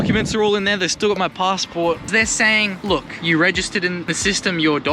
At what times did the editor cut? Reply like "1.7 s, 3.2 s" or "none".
2.1 s, 3.1 s, 4.1 s